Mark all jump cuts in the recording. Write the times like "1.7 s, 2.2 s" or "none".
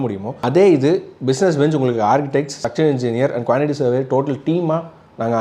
none